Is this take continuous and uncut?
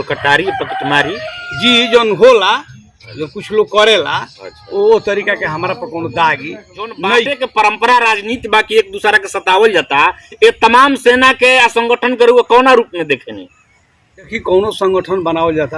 no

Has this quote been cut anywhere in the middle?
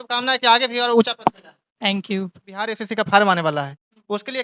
yes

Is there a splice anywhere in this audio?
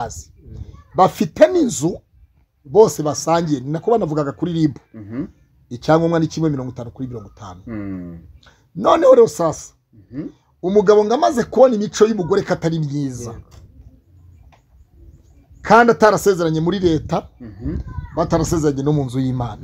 no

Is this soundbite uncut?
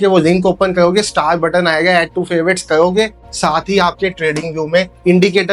yes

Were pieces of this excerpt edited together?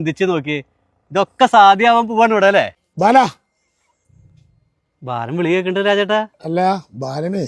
yes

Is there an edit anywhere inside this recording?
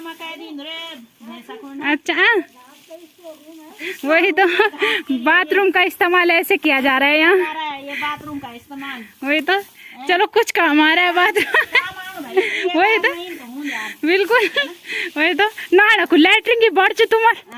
no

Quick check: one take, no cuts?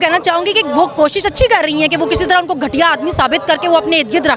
yes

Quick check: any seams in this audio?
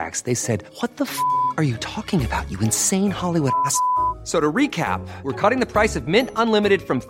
no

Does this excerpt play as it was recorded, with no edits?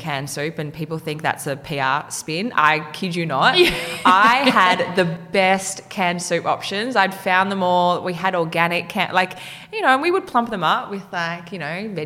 yes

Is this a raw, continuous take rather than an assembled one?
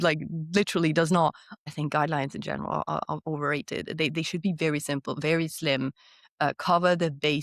no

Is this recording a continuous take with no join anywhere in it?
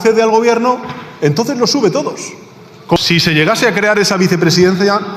no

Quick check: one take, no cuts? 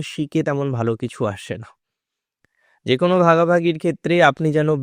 yes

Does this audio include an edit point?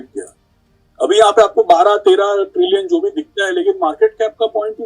no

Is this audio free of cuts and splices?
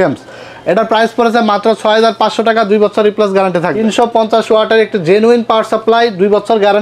no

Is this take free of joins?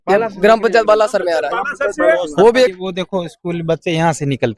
no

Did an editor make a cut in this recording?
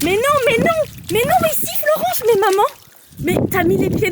no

